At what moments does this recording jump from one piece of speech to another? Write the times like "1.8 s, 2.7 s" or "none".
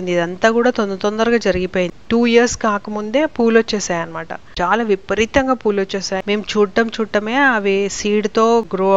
2.0 s, 6.2 s

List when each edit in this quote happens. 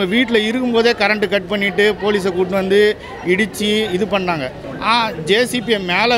none

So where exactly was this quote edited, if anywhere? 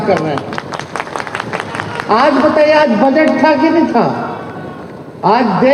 none

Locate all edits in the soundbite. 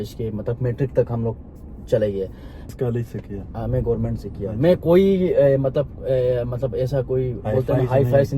2.7 s

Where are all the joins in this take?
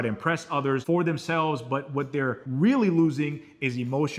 0.8 s, 2.4 s

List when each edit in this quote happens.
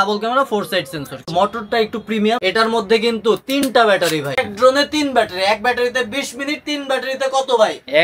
1.3 s, 2.4 s, 4.4 s

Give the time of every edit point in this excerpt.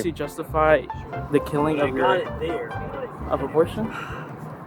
none

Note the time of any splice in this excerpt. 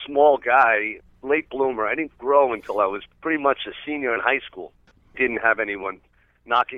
0.9 s, 3.1 s, 5.1 s

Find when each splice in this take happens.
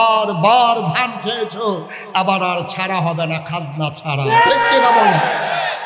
none

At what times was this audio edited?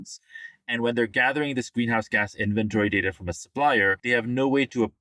4.0 s

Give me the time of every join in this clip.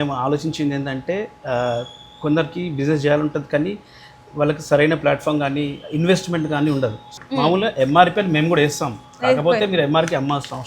7.1 s

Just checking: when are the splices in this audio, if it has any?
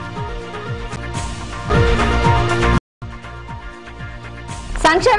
1.0 s

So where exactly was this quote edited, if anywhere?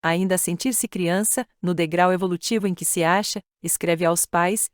1.8 s

